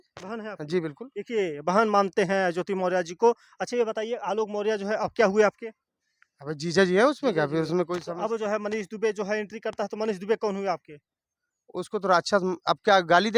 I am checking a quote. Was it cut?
no; 0 cuts

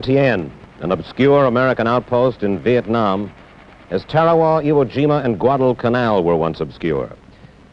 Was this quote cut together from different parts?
yes; 1 cut; at 2.4 s

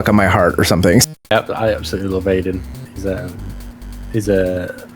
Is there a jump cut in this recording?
yes; 1 cut; at 1.1 s

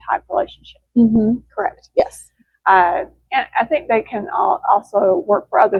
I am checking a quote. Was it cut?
no; 0 cuts

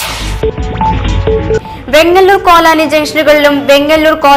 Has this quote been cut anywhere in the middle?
no; 0 cuts

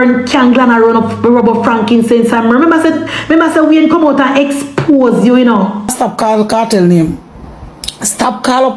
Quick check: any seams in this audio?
yes; 1 cut; at 5.9 s

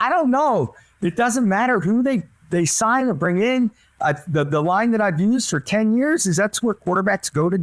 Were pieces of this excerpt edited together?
no; 0 cuts

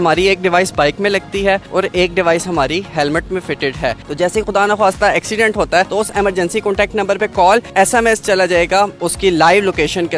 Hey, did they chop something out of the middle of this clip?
yes; 4 cuts; at 4.0 s, 5.9 s, 7.7 s, 9.0 s

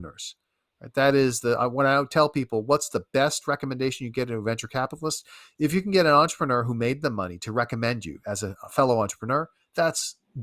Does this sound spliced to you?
no; 0 cuts

